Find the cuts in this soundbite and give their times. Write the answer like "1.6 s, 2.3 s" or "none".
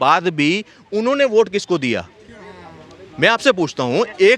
none